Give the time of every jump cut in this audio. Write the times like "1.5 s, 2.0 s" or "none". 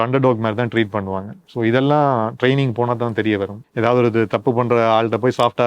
3.6 s